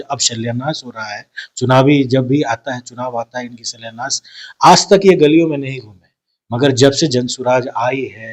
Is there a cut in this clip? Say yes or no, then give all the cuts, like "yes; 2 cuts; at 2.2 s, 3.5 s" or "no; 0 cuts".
no; 0 cuts